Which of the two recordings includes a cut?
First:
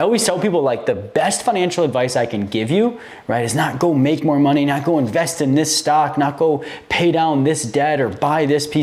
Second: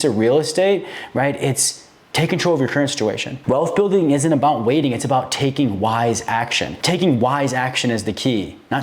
second; 2 cuts; at 3.3 s, 6.8 s

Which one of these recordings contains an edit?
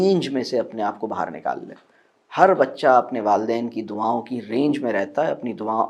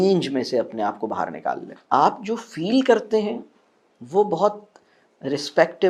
second; 1 cut; at 1.7 s

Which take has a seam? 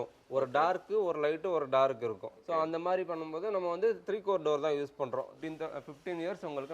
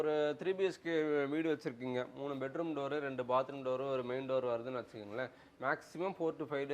first; 2 cuts; at 2.3 s, 5.3 s

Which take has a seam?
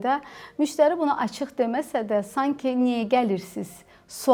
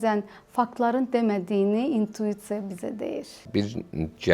second; 1 cut; at 3.4 s

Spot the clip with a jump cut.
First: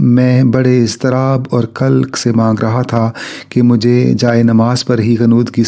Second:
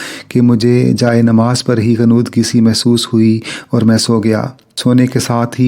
second; 1 cut; at 4.6 s

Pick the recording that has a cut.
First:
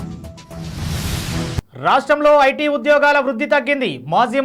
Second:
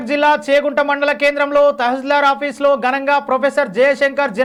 first; 1 cut; at 1.6 s

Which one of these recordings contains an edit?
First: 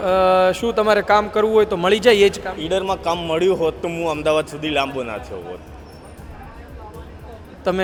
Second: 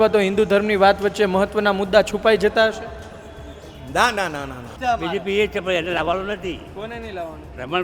second; 1 cut; at 4.7 s

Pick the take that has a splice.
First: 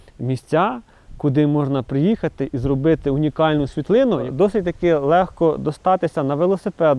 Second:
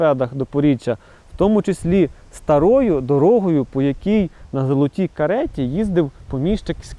first; 1 cut; at 4.2 s

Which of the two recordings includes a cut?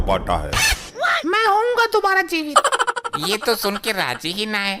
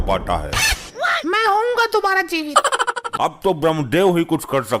second; 1 cut; at 3.1 s

